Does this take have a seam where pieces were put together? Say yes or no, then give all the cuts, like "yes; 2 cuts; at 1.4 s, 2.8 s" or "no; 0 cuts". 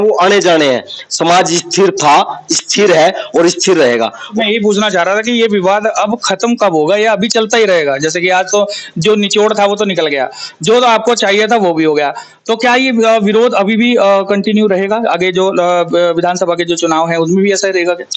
yes; 1 cut; at 4.2 s